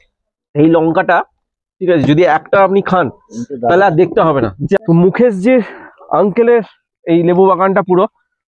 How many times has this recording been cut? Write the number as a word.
one